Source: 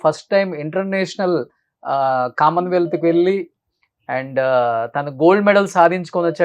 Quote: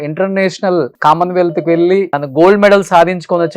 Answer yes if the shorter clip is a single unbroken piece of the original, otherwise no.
no